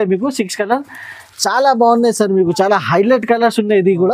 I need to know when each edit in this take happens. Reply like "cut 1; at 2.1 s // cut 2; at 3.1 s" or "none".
none